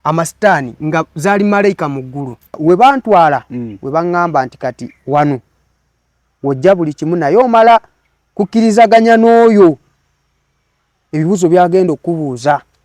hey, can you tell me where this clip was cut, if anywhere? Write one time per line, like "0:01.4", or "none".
0:02.5